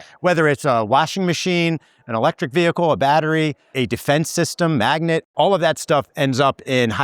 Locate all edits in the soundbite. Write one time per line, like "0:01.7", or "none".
0:03.7
0:05.3